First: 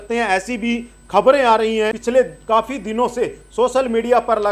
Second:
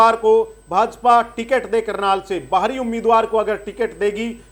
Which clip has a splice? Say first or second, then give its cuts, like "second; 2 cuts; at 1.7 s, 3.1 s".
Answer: first; 1 cut; at 2.0 s